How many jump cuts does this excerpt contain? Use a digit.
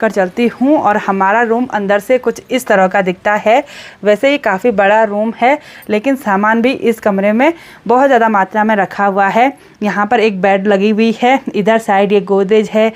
0